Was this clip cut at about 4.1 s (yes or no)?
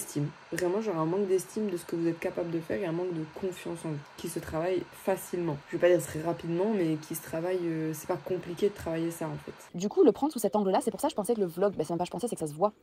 no